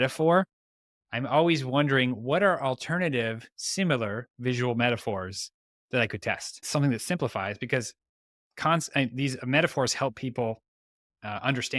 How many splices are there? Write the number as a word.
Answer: one